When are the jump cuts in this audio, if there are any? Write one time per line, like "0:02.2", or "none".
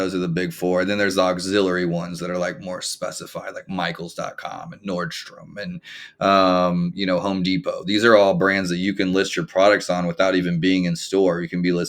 none